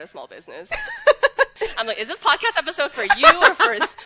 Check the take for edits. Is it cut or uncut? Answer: cut